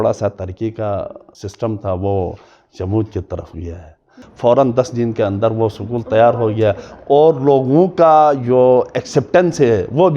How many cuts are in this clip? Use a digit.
1